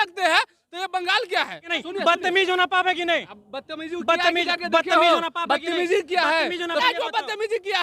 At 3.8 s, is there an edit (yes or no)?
no